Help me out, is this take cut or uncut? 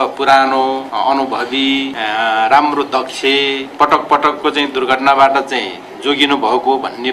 cut